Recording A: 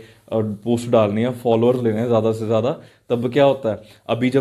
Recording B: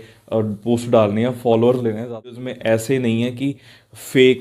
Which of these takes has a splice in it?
B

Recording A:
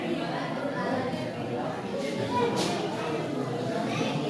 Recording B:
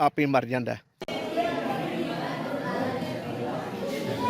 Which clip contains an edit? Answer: B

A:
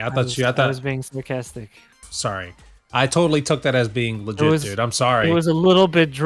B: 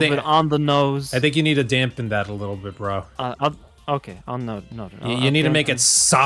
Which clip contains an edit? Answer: A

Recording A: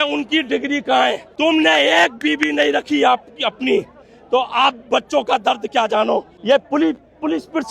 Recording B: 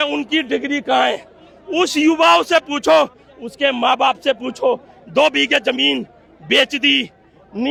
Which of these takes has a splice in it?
A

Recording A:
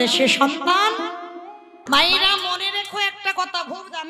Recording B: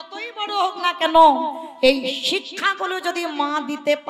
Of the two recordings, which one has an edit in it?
A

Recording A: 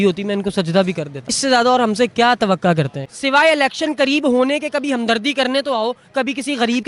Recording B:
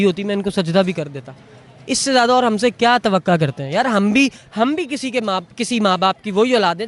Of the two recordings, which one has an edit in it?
A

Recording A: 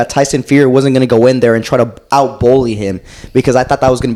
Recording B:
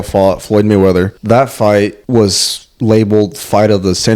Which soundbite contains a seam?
B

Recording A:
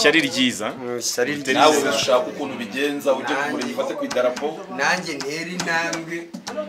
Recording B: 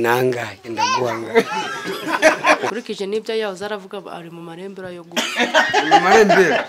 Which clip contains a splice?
B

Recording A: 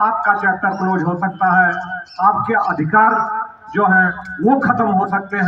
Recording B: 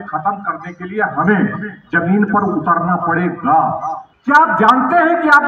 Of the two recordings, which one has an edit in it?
B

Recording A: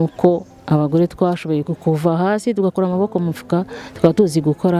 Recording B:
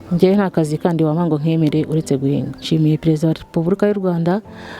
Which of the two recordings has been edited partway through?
B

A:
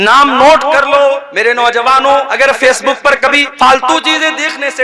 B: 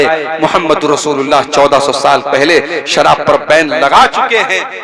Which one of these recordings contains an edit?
A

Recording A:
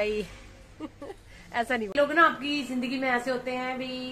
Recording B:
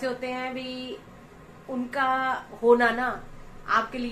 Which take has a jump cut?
A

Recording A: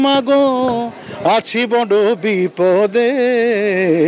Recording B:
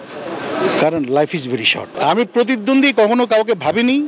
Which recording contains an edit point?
B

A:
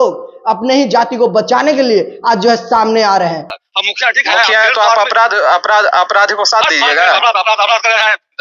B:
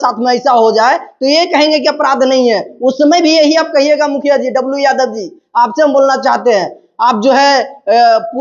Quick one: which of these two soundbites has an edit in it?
A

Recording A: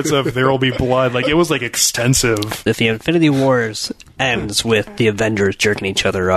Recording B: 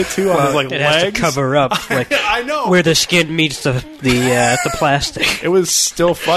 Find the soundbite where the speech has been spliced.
A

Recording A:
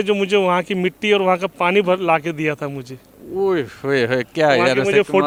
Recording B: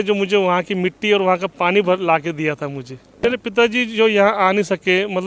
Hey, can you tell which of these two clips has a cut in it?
B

